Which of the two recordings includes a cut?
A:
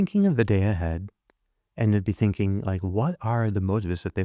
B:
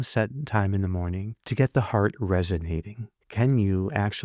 B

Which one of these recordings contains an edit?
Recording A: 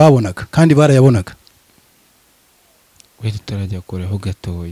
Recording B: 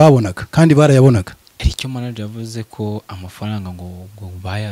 B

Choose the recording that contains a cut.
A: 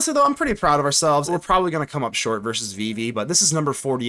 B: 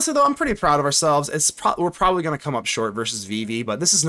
A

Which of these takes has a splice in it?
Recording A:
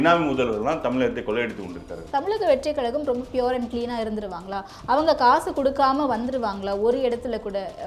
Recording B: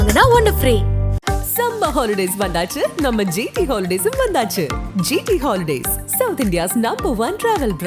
A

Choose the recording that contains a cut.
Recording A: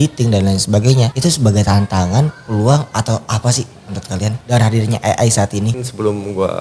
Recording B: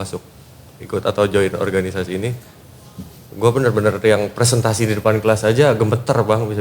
A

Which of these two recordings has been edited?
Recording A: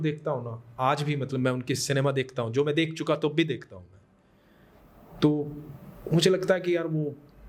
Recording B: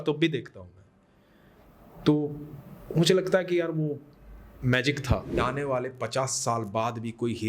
B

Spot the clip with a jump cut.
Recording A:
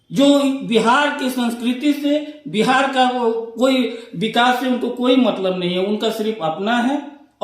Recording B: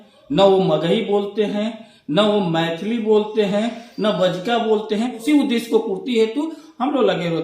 B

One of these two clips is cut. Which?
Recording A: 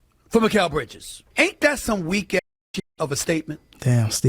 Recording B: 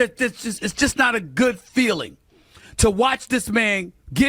A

